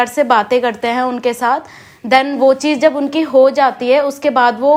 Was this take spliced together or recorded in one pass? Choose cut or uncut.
uncut